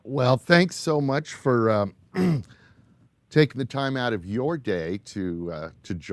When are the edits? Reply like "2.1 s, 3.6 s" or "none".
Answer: none